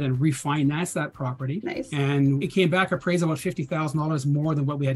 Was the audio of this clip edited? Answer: yes; 2 cuts; at 1.6 s, 2.4 s

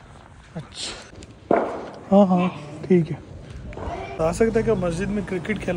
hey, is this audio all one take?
no; 2 cuts; at 1.4 s, 4.1 s

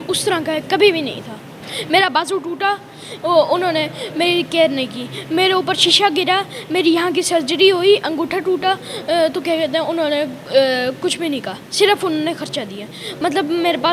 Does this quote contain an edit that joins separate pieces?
no; 0 cuts

